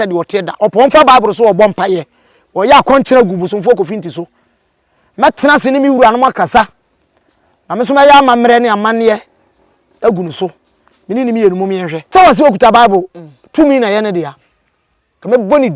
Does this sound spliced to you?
yes; 1 cut; at 12.0 s

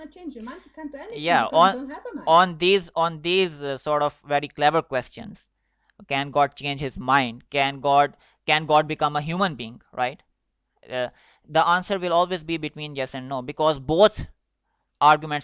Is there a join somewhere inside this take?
no; 0 cuts

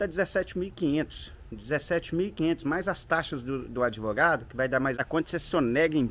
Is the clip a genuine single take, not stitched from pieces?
no; 1 cut; at 5.0 s

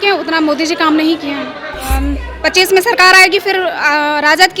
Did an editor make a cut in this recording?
yes; 1 cut; at 1.8 s

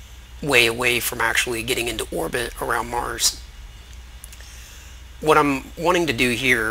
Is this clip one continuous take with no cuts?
no; 1 cut; at 2.4 s

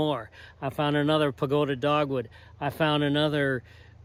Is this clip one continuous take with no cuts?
yes; 0 cuts

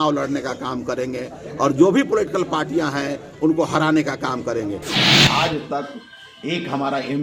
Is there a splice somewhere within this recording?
yes; 1 cut; at 5.0 s

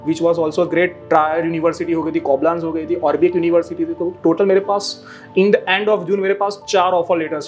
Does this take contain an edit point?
no; 0 cuts

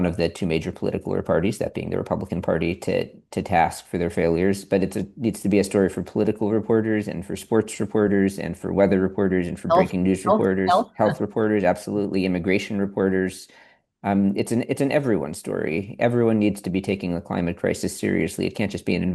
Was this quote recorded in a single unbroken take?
yes; 0 cuts

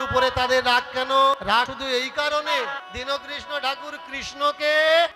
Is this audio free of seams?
no; 2 cuts; at 1.6 s, 2.8 s

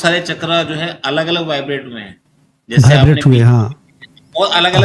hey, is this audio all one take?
yes; 0 cuts

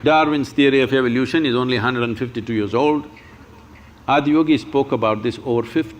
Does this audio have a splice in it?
no; 0 cuts

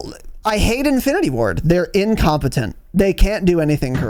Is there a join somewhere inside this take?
no; 0 cuts

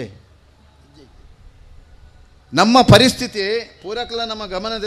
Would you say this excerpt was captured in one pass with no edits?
yes; 0 cuts

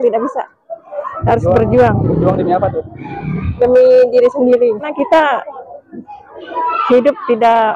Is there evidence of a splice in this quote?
yes; 1 cut; at 4.9 s

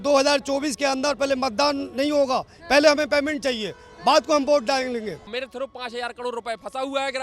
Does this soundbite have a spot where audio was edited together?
yes; 1 cut; at 5.3 s

